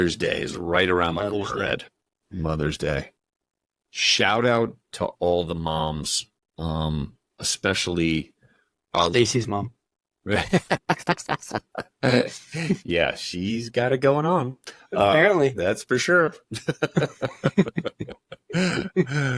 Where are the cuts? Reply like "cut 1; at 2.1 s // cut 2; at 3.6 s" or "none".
none